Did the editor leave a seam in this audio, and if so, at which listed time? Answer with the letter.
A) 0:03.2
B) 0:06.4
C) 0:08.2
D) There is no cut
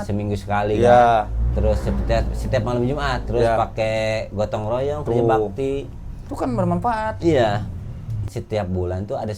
C